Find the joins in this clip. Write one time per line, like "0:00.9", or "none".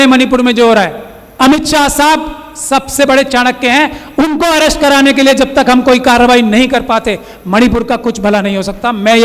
0:01.4

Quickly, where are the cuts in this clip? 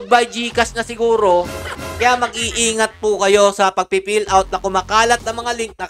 0:01.8

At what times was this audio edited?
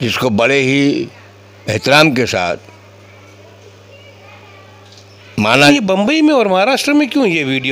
0:05.7

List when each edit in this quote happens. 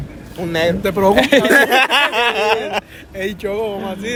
none

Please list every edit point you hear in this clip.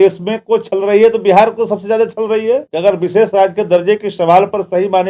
0:02.7

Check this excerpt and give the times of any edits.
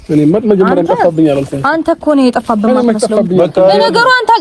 0:02.4

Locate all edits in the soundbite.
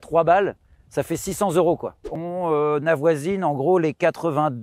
0:02.1

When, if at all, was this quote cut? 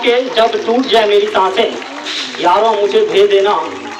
none

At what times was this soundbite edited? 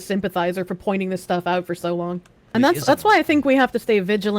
0:02.3

